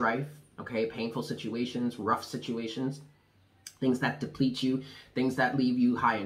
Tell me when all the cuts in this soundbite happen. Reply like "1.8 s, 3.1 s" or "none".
none